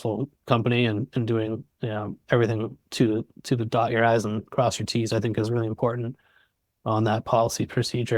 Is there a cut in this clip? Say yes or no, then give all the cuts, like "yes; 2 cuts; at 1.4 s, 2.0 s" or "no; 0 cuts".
no; 0 cuts